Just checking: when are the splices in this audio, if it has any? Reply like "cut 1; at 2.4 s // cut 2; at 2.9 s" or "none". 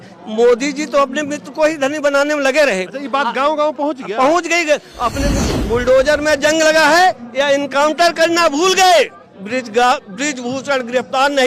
cut 1; at 5.4 s